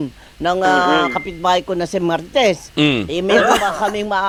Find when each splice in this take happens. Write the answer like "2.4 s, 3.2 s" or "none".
none